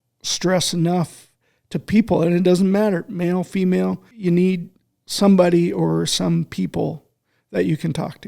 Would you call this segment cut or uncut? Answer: cut